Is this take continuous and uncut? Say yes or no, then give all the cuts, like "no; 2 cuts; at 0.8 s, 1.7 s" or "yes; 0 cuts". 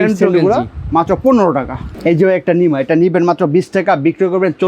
no; 1 cut; at 1.9 s